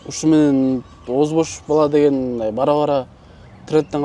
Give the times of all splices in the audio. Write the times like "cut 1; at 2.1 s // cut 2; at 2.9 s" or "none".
none